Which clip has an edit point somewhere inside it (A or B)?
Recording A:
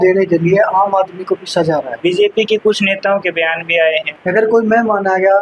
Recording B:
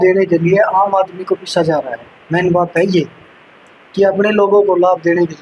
A